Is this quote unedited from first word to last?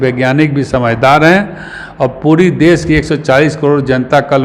yes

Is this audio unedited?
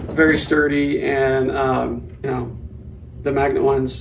no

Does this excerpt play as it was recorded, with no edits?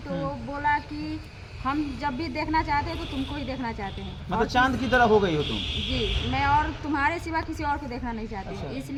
yes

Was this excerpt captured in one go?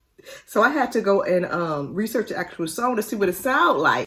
yes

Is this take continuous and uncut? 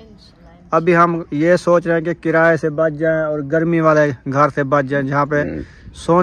yes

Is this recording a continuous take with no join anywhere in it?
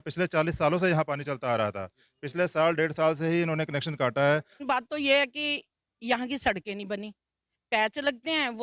no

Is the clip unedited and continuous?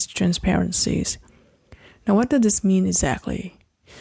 yes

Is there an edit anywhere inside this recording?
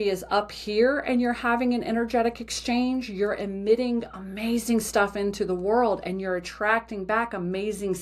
no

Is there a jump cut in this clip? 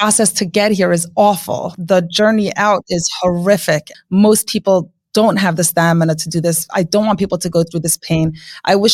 yes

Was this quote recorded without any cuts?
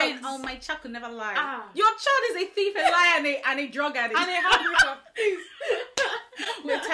yes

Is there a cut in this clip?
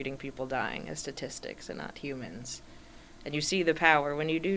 no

